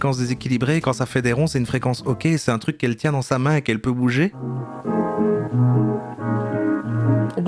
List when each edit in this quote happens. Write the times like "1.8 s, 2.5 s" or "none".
4.4 s